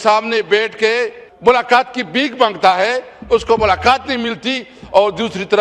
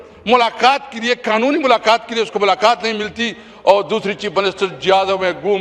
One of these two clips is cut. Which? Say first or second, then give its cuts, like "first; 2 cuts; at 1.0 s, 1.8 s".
first; 1 cut; at 1.2 s